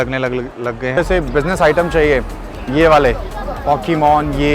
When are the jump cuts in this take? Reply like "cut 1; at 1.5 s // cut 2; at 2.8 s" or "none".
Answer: cut 1; at 0.9 s